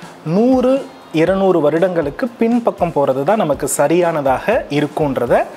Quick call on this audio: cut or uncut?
uncut